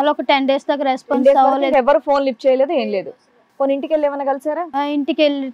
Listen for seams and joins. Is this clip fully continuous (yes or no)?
yes